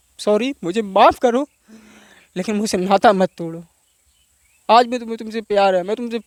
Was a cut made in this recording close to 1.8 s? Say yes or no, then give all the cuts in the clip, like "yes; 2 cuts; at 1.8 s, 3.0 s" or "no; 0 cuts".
no; 0 cuts